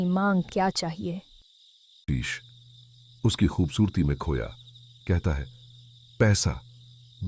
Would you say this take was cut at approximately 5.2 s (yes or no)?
no